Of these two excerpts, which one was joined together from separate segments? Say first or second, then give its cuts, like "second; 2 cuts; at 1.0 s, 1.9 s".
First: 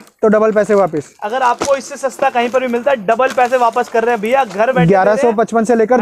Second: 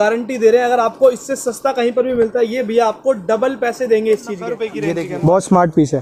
second; 1 cut; at 4.7 s